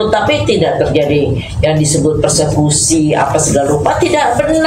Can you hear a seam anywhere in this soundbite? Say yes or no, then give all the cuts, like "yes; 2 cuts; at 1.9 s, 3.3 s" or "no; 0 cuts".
no; 0 cuts